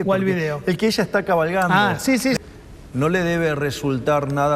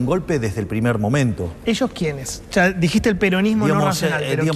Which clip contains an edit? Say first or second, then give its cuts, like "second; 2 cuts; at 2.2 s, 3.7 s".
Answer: first; 1 cut; at 2.4 s